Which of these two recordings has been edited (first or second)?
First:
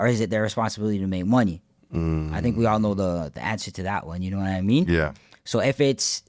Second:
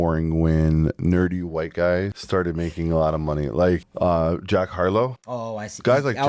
second